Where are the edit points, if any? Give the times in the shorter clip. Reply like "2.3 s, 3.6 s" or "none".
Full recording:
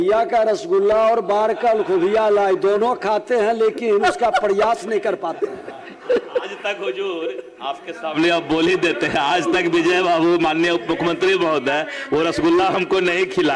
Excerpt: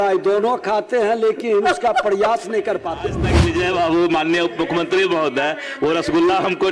3.2 s